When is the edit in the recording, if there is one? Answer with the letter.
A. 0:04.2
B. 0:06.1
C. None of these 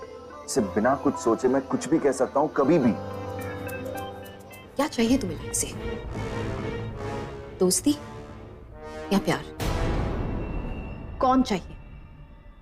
C